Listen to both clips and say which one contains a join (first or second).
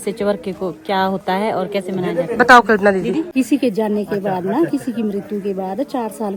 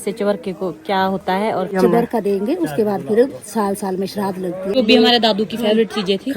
second